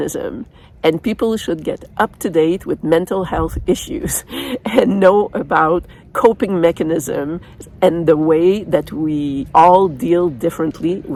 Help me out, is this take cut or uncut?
uncut